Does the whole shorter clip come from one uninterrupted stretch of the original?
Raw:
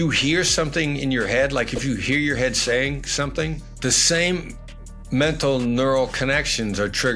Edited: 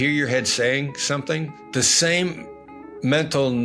yes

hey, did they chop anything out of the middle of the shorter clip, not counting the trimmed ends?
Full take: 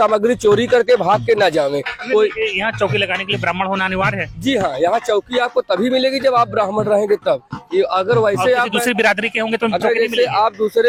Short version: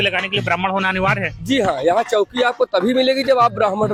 no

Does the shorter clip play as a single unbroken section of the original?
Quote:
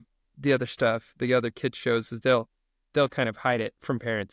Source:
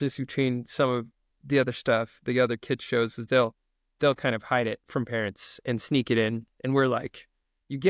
yes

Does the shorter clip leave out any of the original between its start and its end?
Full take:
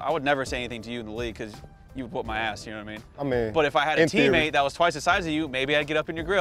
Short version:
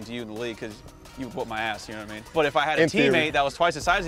yes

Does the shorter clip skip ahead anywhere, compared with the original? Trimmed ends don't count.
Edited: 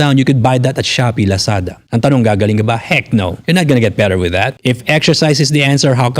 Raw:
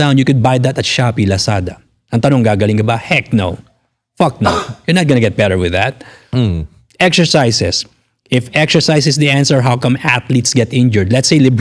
yes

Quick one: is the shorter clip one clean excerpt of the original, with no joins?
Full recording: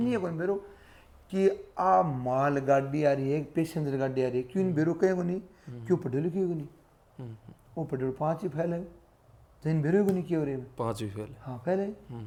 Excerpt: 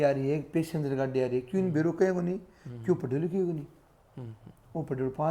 yes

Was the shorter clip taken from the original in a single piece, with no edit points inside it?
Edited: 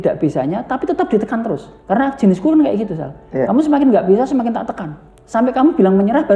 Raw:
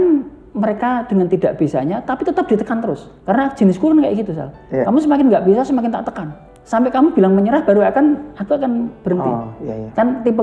yes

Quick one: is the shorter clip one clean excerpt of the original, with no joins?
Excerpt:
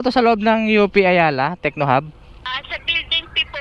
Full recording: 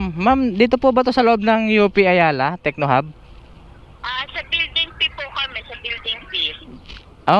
no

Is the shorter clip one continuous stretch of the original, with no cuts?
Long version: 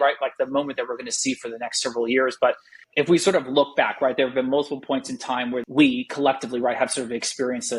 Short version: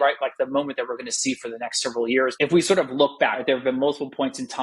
no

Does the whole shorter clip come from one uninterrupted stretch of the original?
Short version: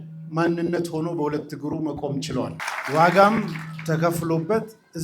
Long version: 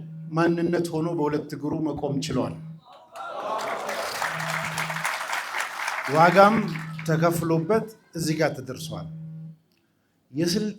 no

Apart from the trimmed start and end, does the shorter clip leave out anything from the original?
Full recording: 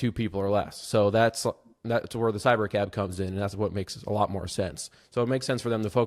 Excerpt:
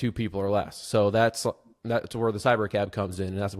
no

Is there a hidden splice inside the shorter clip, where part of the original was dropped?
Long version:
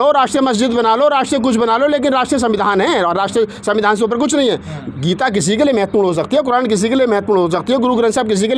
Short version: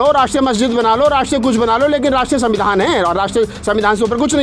no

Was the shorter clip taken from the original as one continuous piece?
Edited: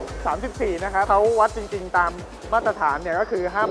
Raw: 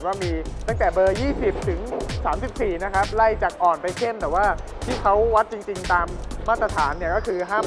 no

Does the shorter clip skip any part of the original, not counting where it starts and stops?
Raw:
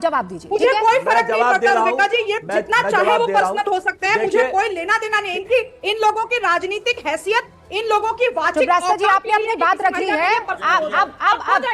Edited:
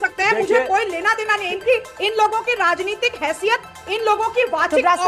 no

